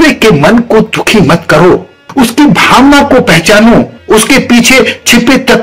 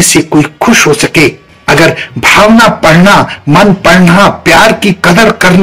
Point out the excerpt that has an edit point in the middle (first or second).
first